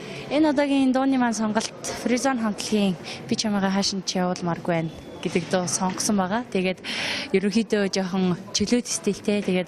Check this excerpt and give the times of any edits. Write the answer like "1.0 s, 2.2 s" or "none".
none